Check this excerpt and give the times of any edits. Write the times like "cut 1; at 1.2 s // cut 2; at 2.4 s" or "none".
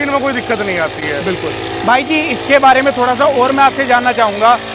none